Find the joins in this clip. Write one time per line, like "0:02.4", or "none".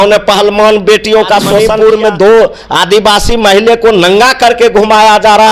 0:01.6